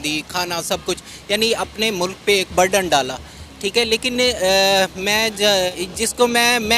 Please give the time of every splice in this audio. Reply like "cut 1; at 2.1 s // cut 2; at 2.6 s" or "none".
cut 1; at 5.7 s